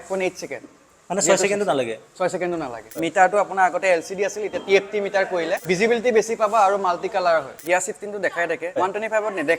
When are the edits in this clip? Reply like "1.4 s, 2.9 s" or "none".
3.0 s, 5.6 s, 7.6 s, 8.8 s